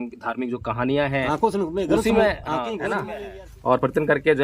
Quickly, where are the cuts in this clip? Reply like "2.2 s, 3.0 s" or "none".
3.1 s